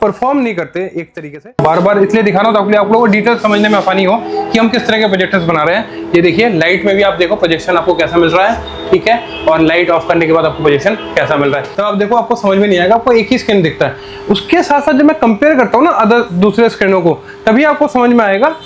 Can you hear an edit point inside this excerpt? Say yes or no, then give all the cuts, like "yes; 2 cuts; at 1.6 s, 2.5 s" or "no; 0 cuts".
yes; 2 cuts; at 1.6 s, 11.7 s